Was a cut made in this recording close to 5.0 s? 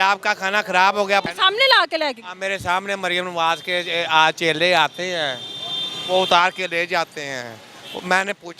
no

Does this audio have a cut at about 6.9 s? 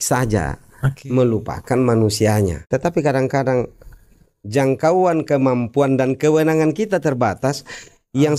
no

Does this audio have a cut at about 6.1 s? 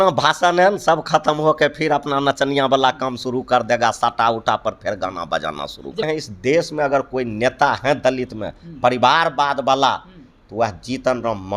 yes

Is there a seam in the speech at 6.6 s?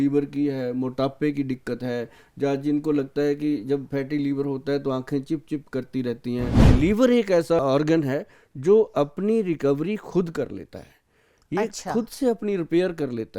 yes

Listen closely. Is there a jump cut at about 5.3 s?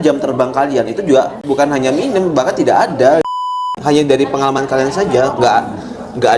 no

